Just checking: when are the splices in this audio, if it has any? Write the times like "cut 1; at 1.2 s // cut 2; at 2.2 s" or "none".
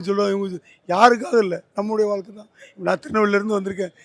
none